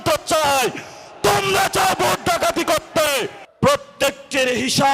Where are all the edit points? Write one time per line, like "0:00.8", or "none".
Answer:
0:03.4

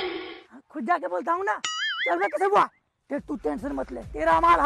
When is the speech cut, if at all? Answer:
none

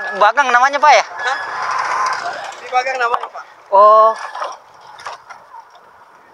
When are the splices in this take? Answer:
none

